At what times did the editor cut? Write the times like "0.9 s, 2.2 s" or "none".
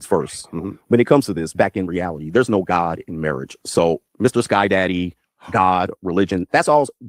none